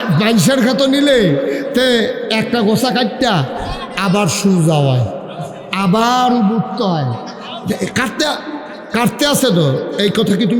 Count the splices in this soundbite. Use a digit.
0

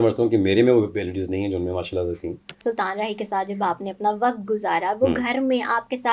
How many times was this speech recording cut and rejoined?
1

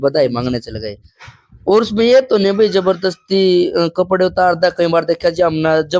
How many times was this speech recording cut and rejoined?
0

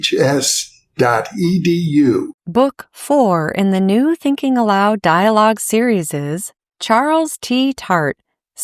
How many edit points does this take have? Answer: 1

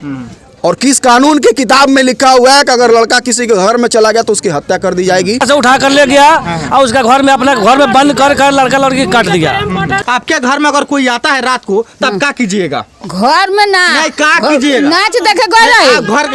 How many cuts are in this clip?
2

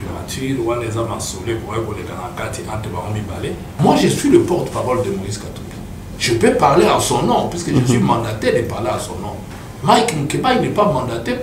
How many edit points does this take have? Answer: 1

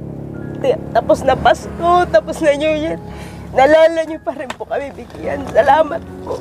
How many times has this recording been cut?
0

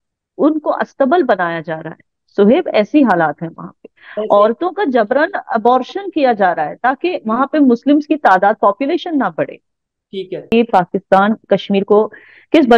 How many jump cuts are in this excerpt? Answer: 1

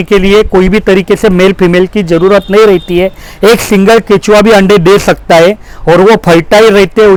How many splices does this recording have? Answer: 0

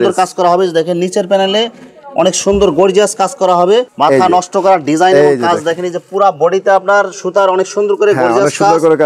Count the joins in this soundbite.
1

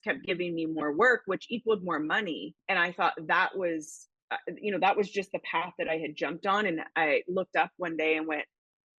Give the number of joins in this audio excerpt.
1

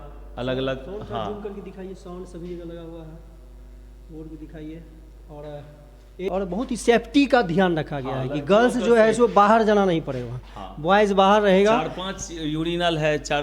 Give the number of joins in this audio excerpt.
1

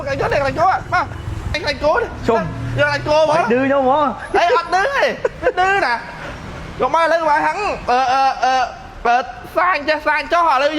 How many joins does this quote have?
1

